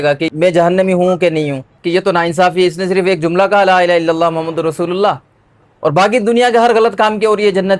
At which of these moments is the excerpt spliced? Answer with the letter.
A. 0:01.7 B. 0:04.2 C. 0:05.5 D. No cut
A